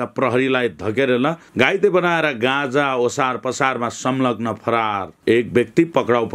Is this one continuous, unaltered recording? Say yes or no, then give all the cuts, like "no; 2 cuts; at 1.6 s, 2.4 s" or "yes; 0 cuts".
yes; 0 cuts